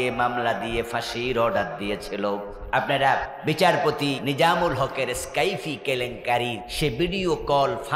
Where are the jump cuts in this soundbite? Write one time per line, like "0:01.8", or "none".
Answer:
0:02.5
0:03.3
0:04.2
0:06.7